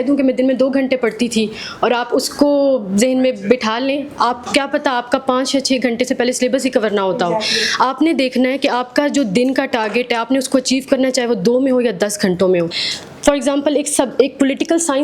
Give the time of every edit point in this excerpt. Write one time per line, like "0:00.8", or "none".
0:12.8